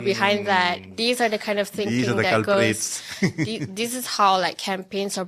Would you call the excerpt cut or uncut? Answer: uncut